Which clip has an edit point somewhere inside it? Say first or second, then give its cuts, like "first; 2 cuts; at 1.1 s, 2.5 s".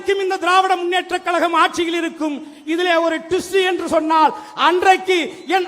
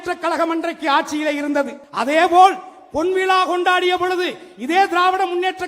second; 1 cut; at 1.8 s